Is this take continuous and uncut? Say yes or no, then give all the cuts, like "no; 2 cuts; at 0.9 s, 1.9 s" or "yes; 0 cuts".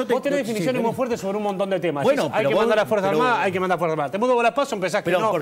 yes; 0 cuts